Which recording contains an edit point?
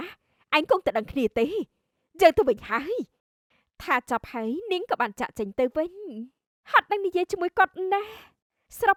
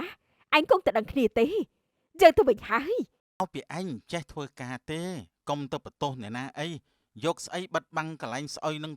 second; 1 cut; at 3.4 s

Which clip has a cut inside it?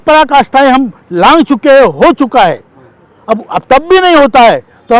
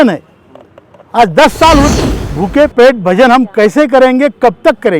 second; 1 cut; at 1.9 s

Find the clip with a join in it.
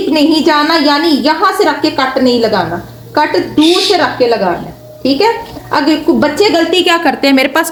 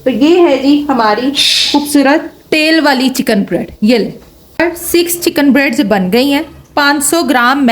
second; 1 cut; at 4.6 s

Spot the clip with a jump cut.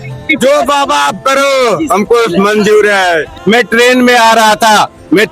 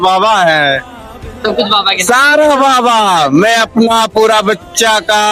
first; 1 cut; at 3.3 s

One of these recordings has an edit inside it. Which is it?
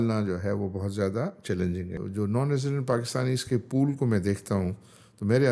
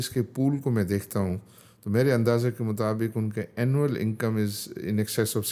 first; 1 cut; at 2.0 s

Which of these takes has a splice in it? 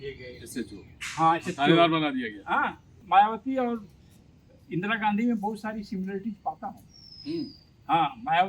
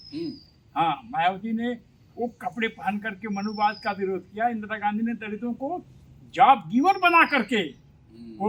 first; 1 cut; at 2.9 s

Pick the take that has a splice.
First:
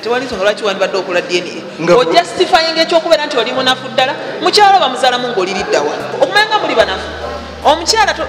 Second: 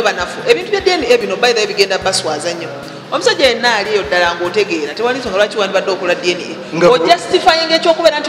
first; 1 cut; at 6.1 s

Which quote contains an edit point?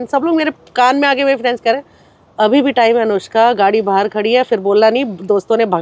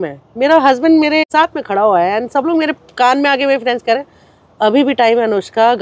second; 1 cut; at 1.2 s

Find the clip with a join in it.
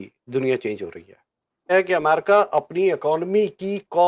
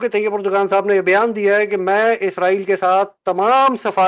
first; 1 cut; at 1.7 s

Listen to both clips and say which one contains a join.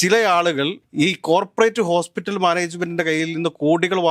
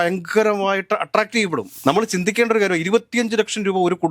second; 1 cut; at 1.7 s

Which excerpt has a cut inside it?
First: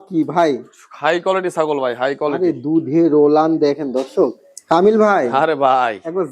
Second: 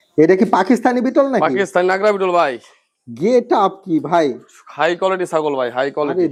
first; 1 cut; at 4.5 s

